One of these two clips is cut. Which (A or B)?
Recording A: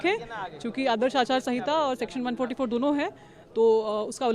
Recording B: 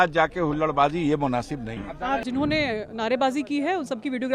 B